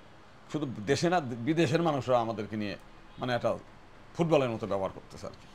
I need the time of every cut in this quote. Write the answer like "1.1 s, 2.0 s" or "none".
none